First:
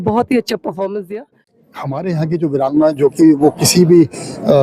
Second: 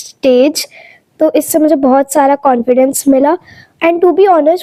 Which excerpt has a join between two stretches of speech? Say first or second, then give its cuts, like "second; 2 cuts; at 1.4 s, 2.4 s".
first; 1 cut; at 1.5 s